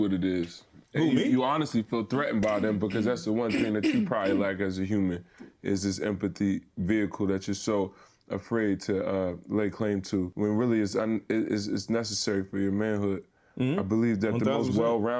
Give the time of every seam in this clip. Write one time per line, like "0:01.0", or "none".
none